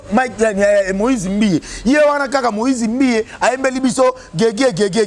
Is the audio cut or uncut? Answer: uncut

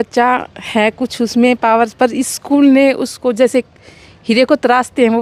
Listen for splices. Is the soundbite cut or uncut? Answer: uncut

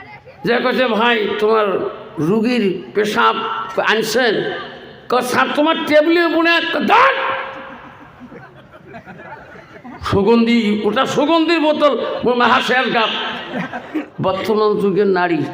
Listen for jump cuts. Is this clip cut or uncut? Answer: cut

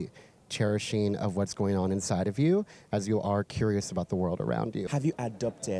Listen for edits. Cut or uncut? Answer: cut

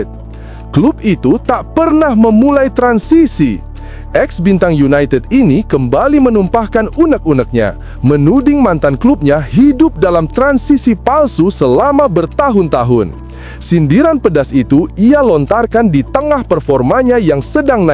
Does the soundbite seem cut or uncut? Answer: uncut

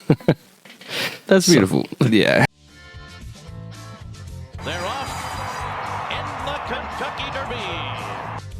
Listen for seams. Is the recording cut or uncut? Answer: cut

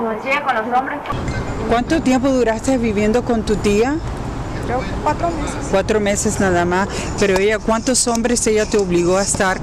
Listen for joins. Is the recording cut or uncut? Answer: uncut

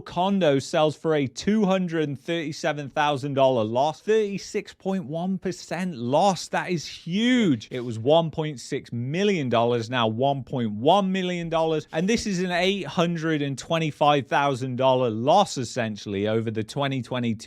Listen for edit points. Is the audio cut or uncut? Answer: cut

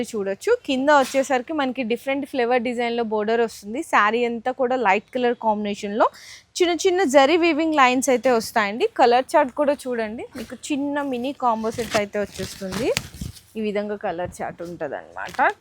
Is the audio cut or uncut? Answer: uncut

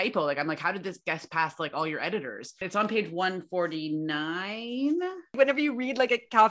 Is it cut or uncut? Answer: cut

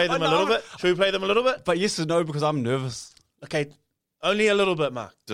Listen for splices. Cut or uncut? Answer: uncut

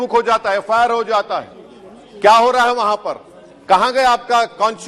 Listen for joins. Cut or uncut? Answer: uncut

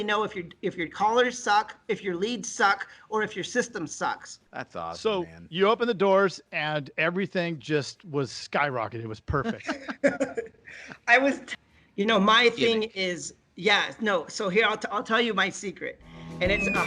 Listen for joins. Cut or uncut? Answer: cut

